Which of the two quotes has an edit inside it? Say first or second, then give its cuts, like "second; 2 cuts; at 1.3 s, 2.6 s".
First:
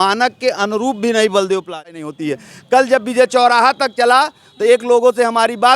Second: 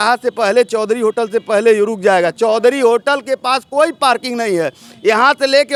first; 1 cut; at 1.8 s